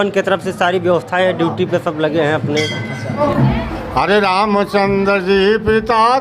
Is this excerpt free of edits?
no; 1 cut; at 3.2 s

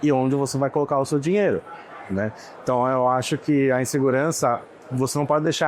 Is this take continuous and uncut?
yes; 0 cuts

